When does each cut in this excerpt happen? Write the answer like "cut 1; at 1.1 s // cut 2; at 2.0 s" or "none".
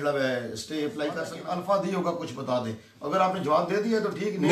cut 1; at 1.4 s